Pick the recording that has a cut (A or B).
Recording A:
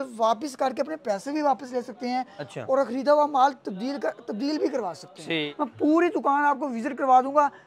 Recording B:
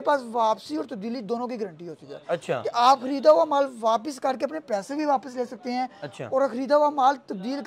A